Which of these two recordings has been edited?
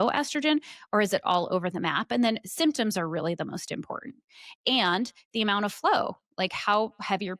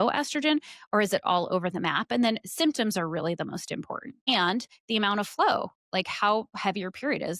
second; 1 cut; at 4.3 s

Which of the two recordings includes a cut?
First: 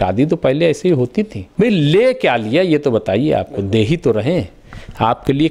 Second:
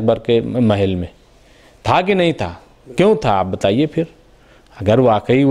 first; 1 cut; at 1.4 s

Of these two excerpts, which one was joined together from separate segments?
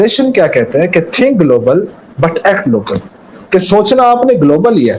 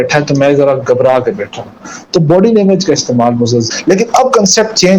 second; 1 cut; at 3.7 s

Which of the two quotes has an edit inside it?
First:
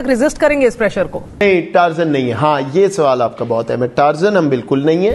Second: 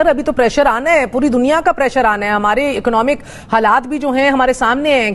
first; 1 cut; at 1.4 s

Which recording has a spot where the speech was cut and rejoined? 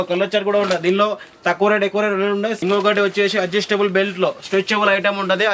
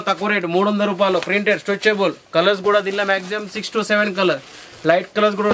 first; 1 cut; at 2.6 s

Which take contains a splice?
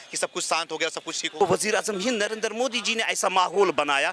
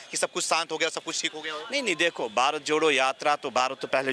first; 1 cut; at 1.2 s

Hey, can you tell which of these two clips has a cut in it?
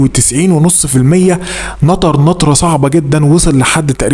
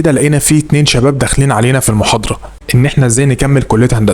second; 1 cut; at 2.5 s

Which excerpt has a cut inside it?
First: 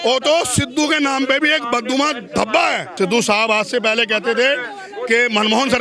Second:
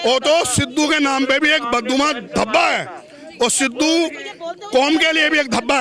first; 1 cut; at 2.9 s

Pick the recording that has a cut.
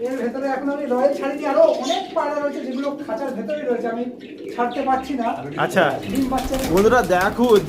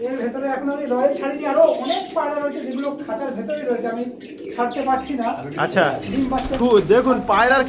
second; 1 cut; at 6.6 s

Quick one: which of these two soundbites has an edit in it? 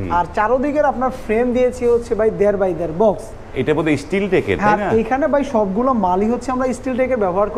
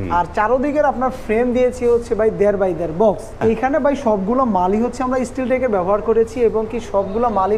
second; 1 cut; at 3.4 s

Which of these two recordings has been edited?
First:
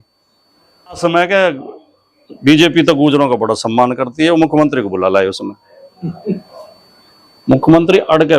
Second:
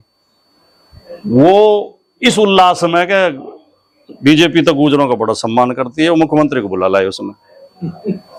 first; 1 cut; at 1.0 s

